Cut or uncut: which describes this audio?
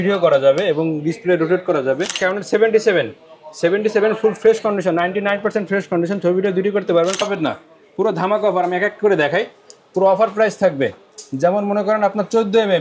cut